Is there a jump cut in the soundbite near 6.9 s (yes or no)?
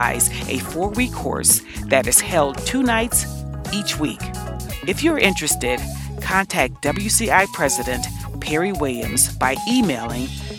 no